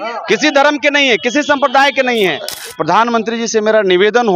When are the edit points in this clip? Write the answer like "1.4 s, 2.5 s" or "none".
2.5 s